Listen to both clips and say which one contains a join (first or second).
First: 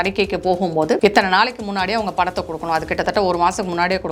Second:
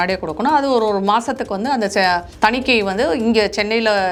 first